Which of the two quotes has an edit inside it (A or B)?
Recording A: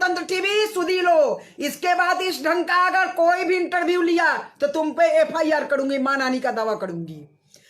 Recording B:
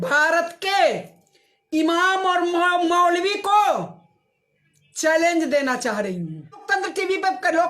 B